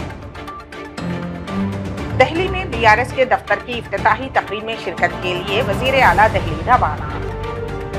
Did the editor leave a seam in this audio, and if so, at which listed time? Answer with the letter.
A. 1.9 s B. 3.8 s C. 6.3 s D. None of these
A